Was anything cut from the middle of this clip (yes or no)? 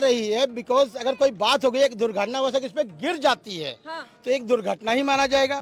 no